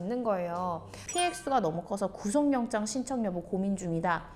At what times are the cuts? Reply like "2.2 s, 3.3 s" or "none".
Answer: 1.0 s